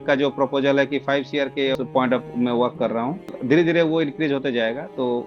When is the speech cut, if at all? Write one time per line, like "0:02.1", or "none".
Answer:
0:01.7
0:03.4